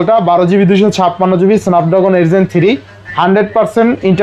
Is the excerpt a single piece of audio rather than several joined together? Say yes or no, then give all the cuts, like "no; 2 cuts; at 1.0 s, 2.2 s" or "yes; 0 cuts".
yes; 0 cuts